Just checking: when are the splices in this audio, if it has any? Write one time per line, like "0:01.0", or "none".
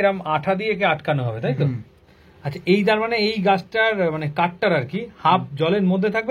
none